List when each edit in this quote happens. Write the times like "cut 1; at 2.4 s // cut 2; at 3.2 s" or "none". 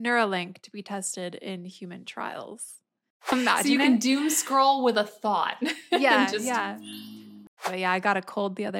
cut 1; at 3.3 s // cut 2; at 7.5 s